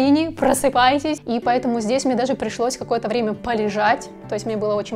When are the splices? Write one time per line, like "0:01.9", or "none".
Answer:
0:01.2

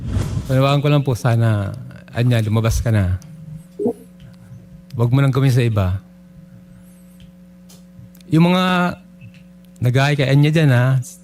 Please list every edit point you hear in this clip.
none

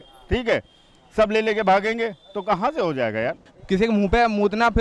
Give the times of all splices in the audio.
0:03.5

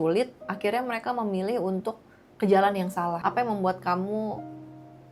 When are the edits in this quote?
0:03.2

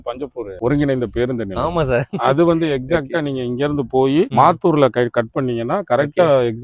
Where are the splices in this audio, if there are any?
none

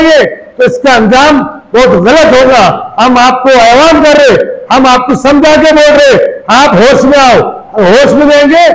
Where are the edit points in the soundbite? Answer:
none

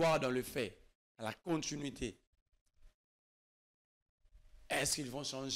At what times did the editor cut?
none

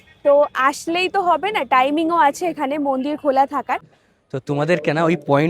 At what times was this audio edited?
0:03.9

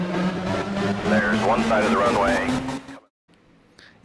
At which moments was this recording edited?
0:02.8

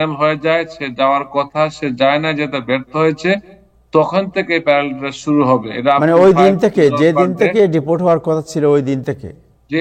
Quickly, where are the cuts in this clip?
none

